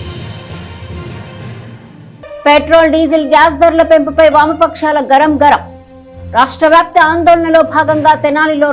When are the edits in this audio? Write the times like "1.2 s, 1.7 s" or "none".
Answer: 1.7 s